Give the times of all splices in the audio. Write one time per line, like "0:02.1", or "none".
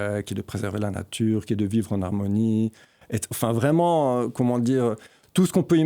none